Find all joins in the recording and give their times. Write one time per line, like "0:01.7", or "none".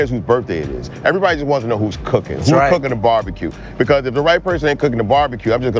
none